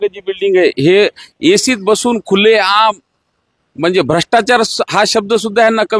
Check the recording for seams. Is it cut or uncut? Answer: uncut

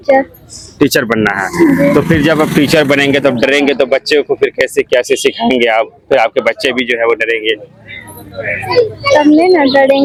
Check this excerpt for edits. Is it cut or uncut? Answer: uncut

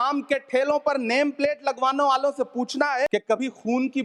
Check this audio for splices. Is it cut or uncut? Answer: cut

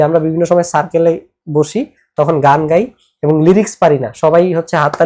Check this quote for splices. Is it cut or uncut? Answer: uncut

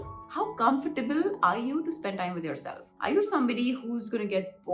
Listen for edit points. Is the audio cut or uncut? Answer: uncut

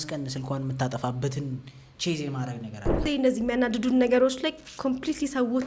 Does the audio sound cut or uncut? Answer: cut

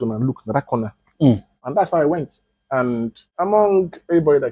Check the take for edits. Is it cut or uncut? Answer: cut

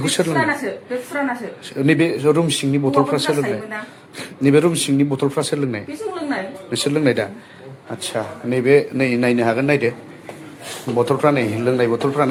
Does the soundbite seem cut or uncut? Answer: uncut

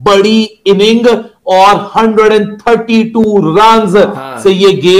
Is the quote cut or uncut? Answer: uncut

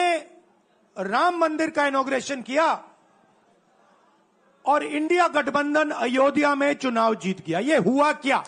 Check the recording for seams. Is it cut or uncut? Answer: uncut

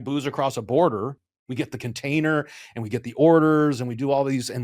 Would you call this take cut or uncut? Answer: cut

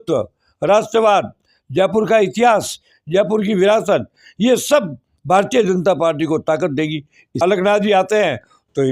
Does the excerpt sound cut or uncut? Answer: cut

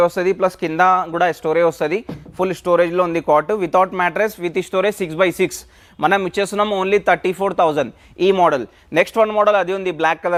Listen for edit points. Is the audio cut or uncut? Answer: uncut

